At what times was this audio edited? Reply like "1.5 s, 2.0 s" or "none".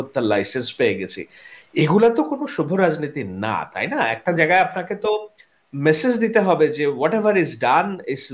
none